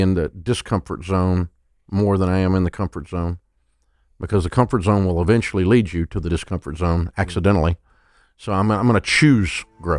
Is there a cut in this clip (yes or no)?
no